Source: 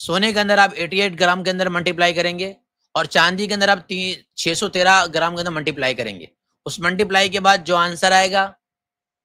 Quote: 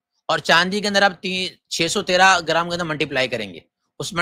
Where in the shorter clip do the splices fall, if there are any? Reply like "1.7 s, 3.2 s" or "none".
none